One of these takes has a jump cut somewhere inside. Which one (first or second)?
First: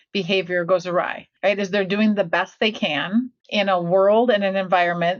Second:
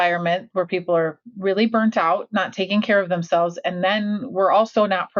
first